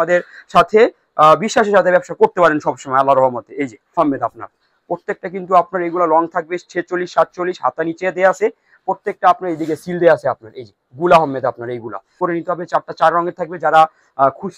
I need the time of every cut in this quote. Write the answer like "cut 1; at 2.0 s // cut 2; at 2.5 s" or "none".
cut 1; at 4.0 s // cut 2; at 12.2 s